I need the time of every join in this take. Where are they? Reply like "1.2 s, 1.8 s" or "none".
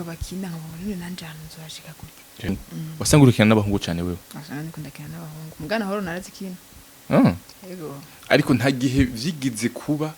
2.6 s